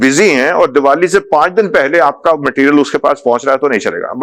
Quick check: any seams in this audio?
no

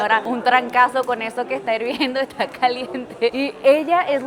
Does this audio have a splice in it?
no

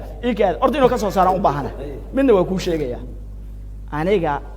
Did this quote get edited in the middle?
no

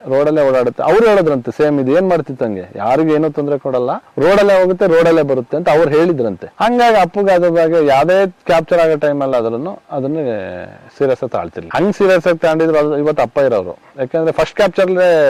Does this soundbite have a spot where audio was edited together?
no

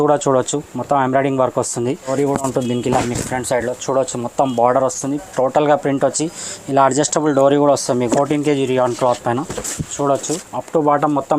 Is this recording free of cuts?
no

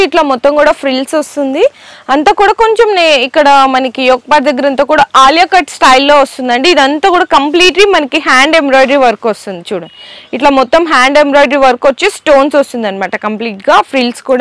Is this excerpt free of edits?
yes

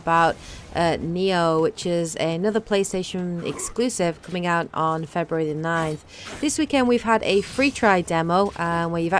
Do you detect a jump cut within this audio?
yes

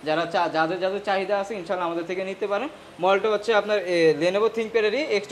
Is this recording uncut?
yes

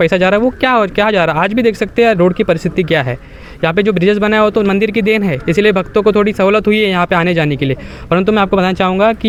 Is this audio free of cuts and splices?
yes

